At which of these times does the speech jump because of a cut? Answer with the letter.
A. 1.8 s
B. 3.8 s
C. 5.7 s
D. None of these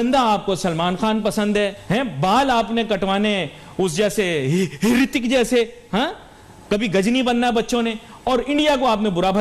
A